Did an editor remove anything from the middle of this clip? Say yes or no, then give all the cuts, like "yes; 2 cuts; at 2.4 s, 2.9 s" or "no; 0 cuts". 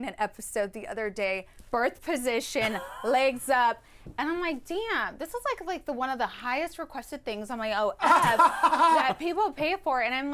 yes; 1 cut; at 1.5 s